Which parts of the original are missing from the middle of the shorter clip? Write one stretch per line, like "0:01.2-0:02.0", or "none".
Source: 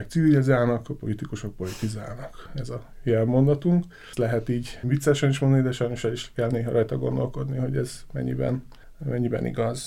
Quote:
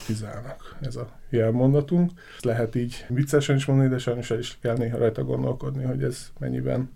none